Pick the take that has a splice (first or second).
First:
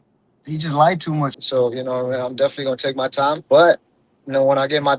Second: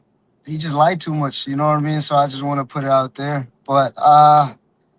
first